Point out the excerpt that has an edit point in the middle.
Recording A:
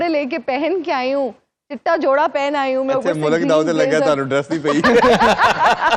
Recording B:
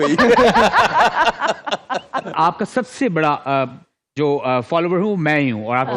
B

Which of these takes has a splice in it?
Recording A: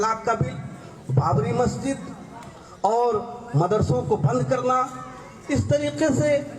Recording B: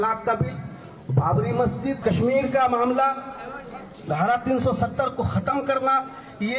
B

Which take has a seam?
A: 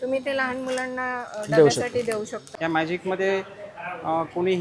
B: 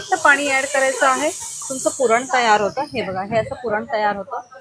A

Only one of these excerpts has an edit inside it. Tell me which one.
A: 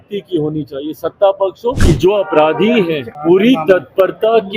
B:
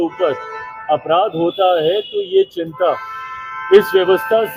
A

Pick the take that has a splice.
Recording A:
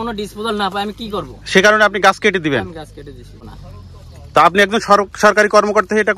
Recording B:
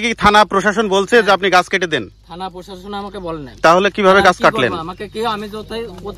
A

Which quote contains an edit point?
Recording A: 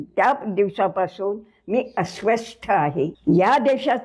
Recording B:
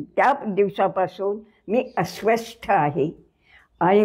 A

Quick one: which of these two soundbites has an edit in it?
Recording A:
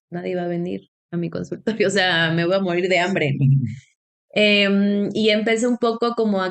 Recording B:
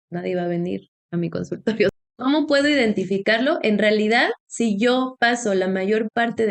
B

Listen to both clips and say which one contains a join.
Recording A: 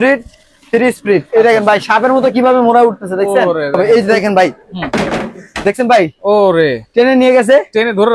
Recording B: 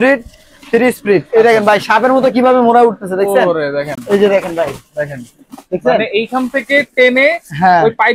A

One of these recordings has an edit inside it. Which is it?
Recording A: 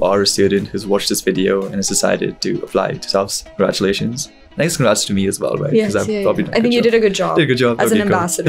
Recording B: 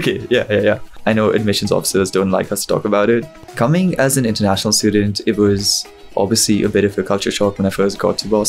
B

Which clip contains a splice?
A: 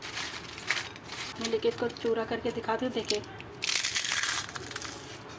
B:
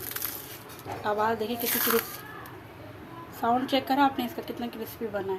A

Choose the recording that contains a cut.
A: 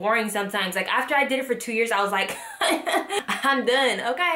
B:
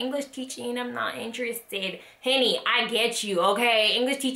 A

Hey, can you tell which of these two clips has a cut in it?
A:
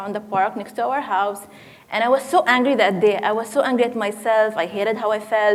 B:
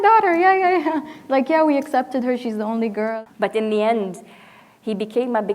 B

